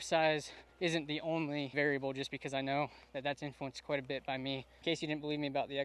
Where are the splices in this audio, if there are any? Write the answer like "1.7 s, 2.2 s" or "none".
4.7 s